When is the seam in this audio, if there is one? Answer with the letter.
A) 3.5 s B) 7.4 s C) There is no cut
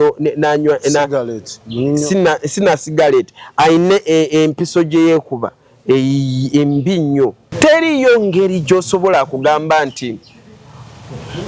B